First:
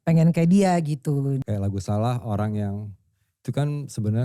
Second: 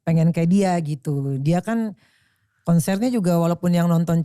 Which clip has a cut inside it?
first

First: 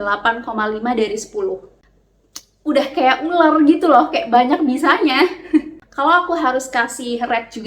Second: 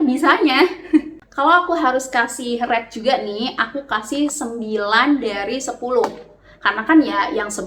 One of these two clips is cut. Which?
first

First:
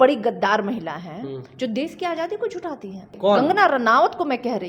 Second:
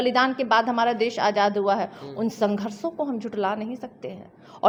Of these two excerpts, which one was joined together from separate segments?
first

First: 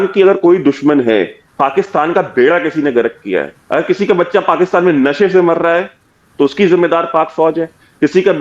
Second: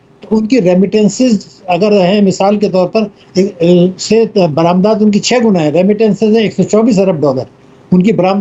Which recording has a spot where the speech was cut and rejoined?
first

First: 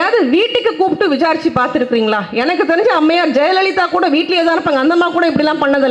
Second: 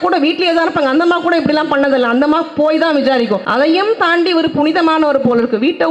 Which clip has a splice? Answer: second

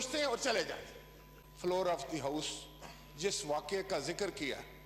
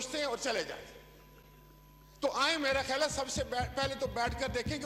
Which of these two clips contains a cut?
first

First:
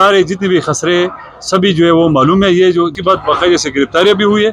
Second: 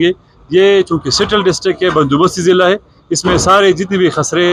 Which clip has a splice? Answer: first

